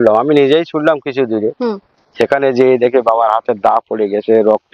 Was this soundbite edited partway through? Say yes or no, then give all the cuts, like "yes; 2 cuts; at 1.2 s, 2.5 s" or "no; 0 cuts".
no; 0 cuts